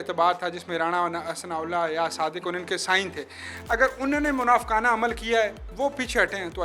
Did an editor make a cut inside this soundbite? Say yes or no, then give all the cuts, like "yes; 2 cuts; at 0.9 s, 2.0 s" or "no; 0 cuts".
no; 0 cuts